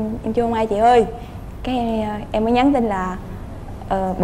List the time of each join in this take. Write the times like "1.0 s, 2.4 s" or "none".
none